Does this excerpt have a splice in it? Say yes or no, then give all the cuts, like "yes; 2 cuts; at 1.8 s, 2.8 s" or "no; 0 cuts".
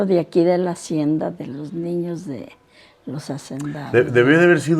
no; 0 cuts